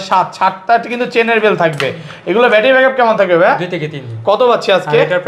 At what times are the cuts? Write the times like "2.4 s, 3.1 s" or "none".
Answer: none